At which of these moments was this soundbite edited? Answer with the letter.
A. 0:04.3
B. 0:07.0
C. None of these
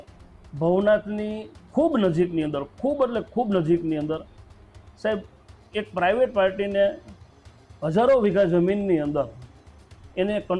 C